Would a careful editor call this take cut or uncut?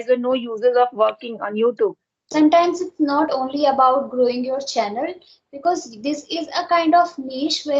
cut